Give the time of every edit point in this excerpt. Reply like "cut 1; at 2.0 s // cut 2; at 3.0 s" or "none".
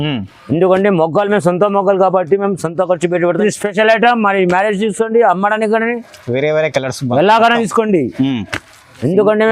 cut 1; at 3.4 s